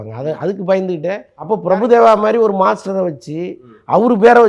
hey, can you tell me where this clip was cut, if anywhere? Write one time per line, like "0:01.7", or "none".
0:01.3